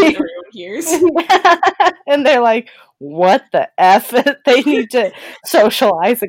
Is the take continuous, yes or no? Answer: yes